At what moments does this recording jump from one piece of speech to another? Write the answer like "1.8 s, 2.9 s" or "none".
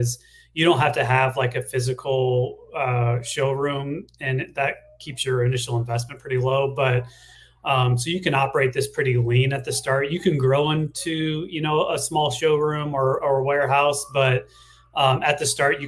none